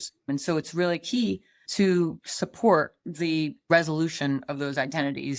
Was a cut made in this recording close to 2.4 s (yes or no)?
no